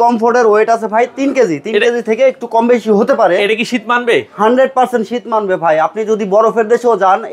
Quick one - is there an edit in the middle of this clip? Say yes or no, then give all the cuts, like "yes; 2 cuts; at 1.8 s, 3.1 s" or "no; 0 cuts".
no; 0 cuts